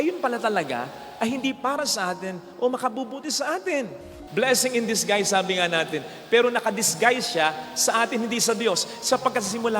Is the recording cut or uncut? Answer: cut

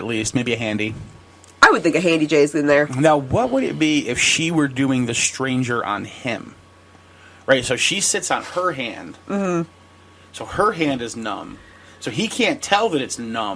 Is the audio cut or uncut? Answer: uncut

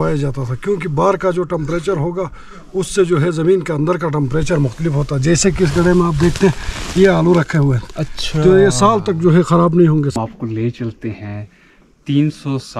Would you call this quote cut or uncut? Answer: cut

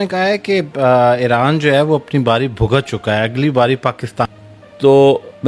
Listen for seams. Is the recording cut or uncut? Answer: cut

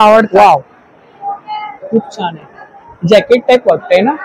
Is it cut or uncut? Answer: uncut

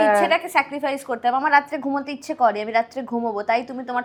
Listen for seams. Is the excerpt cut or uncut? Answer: uncut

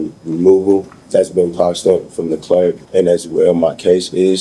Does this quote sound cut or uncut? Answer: cut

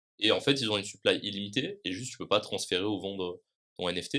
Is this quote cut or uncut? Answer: uncut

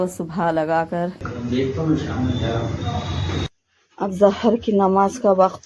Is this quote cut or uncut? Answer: cut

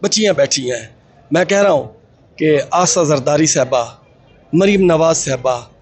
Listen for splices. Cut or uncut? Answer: uncut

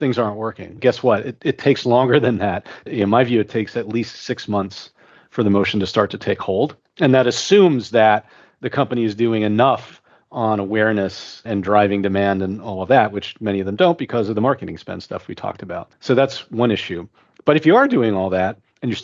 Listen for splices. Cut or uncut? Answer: uncut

